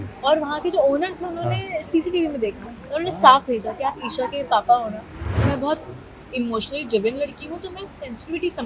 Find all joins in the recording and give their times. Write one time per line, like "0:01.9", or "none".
0:05.3